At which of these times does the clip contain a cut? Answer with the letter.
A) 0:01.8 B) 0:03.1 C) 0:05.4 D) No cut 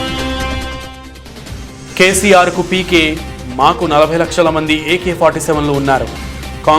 A